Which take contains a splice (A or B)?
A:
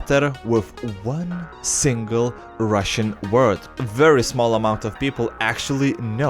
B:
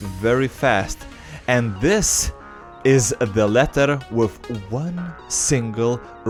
A